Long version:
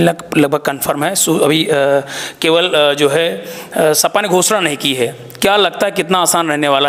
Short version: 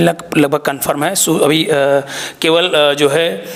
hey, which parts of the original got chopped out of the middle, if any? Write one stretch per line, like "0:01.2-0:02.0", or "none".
none